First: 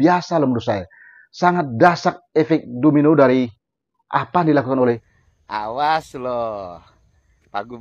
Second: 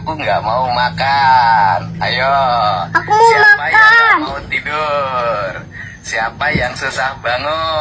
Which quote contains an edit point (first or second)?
first